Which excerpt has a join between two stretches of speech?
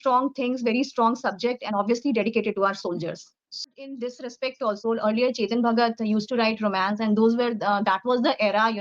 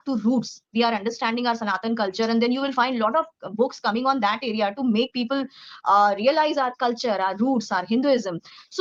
first; 1 cut; at 3.8 s

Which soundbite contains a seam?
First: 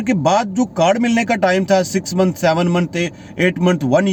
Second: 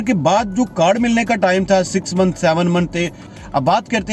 second; 1 cut; at 3.2 s

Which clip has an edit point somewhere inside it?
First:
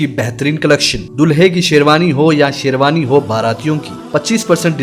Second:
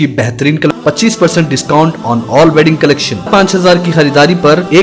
second; 2 cuts; at 0.7 s, 3.3 s

